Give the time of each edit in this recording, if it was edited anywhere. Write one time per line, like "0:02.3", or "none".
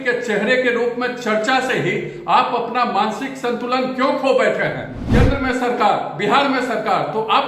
0:04.9